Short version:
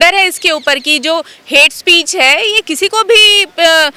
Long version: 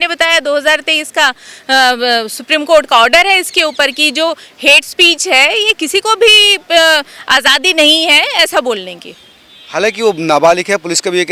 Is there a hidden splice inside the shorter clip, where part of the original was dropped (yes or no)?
no